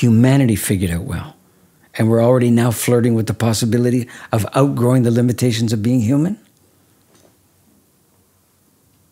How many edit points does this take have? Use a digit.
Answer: 0